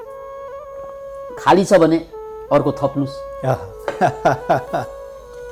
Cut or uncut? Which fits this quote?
uncut